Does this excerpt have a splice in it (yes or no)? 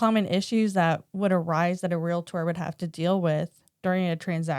yes